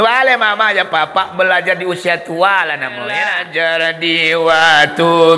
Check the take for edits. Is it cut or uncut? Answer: cut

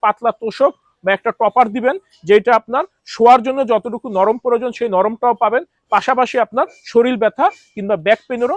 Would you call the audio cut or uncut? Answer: uncut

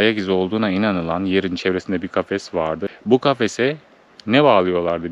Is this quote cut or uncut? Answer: cut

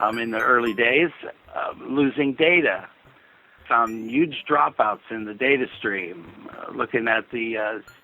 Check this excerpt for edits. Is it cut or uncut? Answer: cut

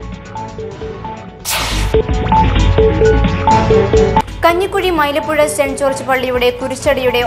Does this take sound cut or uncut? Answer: uncut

